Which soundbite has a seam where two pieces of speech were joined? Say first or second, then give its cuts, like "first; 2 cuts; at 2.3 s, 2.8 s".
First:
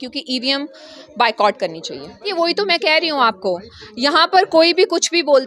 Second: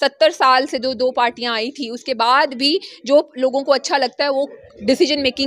first; 1 cut; at 2.3 s